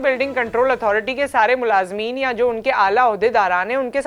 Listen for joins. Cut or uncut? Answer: uncut